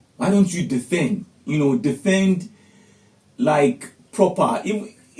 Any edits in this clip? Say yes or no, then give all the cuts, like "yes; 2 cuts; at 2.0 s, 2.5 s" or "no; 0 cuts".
no; 0 cuts